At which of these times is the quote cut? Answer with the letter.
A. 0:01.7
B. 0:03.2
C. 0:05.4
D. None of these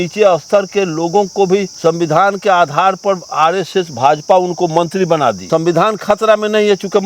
C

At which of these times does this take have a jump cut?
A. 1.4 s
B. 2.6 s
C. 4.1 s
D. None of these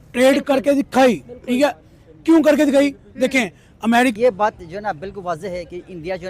C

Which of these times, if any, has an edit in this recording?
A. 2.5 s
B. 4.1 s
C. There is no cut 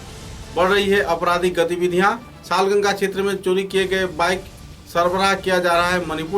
C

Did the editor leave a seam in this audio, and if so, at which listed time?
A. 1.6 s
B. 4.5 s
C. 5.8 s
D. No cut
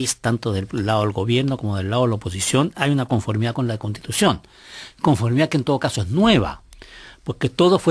B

